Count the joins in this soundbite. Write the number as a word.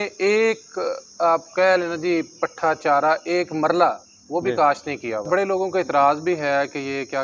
one